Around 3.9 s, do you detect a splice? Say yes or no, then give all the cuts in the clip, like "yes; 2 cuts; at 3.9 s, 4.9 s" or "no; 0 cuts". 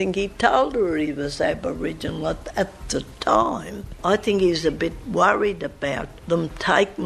yes; 2 cuts; at 3.9 s, 6.1 s